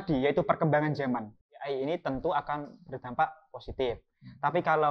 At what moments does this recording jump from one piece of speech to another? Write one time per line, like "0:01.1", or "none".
0:01.7